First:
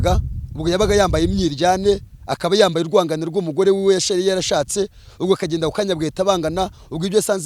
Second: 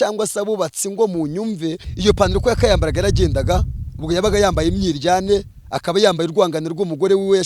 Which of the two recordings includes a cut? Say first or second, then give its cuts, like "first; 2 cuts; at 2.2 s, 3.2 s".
second; 1 cut; at 1.9 s